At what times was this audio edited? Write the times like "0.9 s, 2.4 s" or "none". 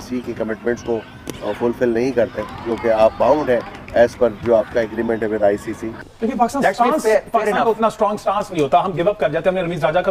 5.9 s